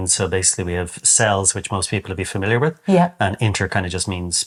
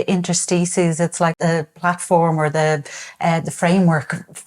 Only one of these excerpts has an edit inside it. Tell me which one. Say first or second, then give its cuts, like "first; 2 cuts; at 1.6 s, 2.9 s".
second; 1 cut; at 1.4 s